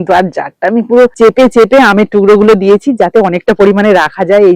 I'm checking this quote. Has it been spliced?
yes; 1 cut; at 1.1 s

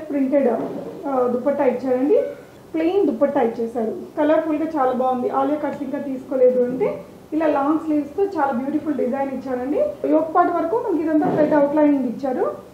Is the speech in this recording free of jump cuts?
no; 2 cuts; at 2.5 s, 10.0 s

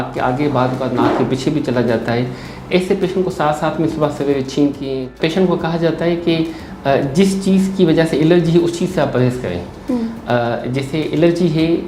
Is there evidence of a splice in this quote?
yes; 1 cut; at 5.2 s

